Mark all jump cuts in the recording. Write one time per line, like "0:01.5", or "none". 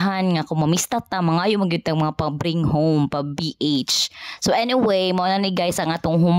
none